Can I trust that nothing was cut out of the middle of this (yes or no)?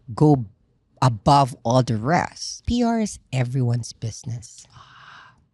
no